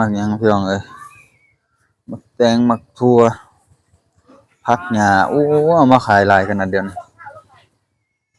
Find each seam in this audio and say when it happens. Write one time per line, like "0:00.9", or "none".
none